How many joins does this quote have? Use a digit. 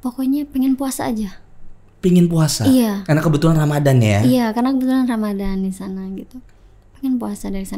0